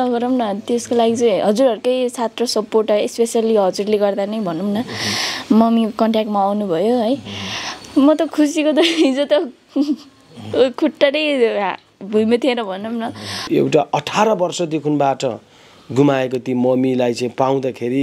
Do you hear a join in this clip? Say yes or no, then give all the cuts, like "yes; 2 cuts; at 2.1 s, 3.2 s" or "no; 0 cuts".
yes; 1 cut; at 13.5 s